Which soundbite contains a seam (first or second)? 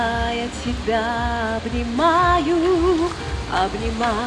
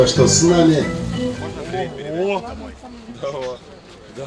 second